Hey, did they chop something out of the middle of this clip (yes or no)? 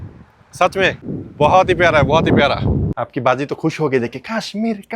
yes